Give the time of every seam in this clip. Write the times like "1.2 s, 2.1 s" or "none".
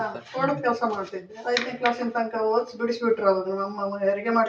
1.3 s